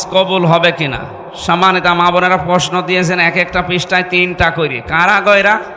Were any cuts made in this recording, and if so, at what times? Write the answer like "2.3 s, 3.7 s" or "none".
none